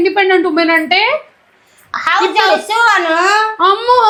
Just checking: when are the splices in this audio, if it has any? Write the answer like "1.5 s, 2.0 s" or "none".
none